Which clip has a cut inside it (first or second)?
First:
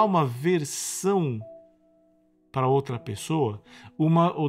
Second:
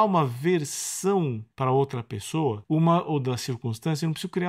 second